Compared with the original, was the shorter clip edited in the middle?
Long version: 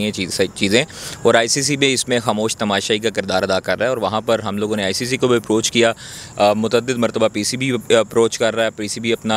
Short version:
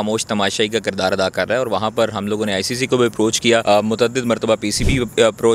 yes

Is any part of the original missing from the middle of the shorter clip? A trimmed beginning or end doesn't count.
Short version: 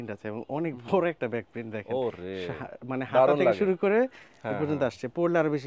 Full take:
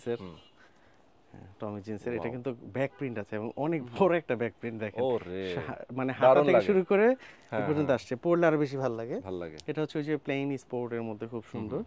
no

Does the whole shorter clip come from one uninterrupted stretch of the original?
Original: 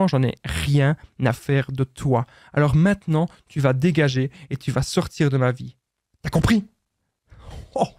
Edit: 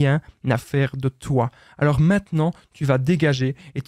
yes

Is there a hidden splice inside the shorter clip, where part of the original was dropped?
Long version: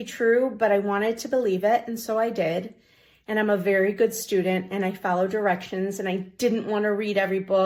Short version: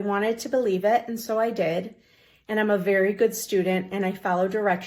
no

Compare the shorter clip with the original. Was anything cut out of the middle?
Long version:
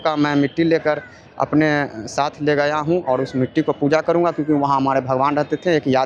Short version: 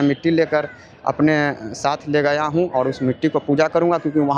no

